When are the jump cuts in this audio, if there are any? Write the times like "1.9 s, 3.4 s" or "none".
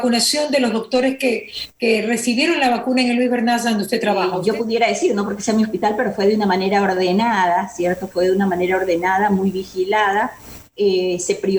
4.3 s